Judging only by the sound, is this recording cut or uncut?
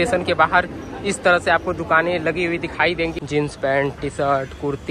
cut